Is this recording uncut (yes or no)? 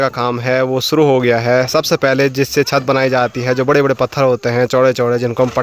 yes